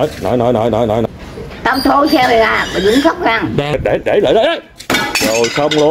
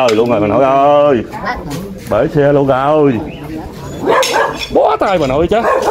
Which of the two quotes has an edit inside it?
first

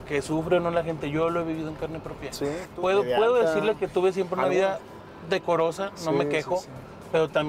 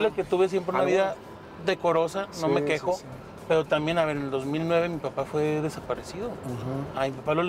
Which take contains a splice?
first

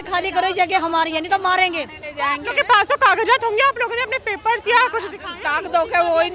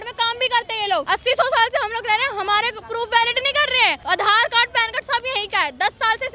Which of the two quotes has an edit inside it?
second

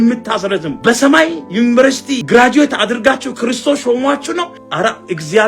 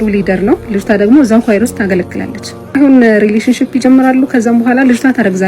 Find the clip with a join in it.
first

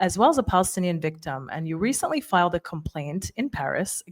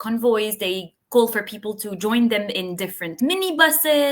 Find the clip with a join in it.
second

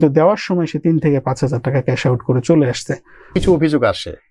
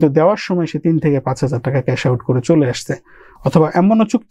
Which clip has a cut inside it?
first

